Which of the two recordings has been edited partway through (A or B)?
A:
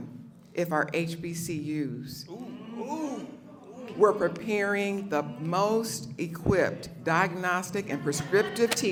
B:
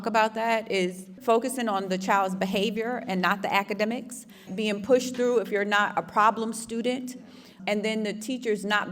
B